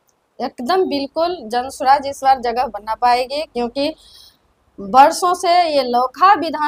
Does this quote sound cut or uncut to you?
uncut